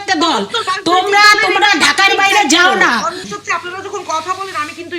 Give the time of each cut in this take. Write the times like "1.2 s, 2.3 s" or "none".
3.3 s